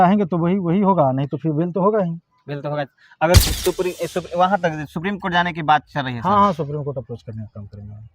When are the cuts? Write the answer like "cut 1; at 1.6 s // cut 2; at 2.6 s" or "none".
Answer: cut 1; at 3.4 s